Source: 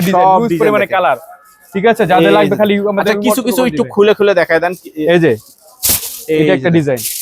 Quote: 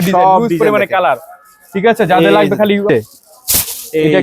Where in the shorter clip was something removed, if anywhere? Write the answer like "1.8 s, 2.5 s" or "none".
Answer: 2.9 s